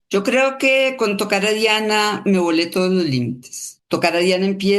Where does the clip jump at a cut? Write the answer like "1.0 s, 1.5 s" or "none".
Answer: none